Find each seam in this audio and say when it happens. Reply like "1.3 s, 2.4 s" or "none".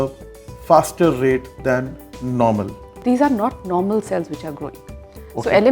3.0 s